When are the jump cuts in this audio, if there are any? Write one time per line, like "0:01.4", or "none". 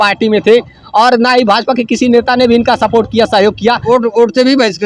0:03.8